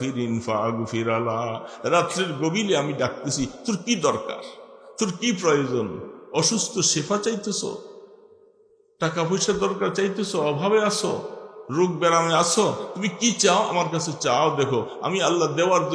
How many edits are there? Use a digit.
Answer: 0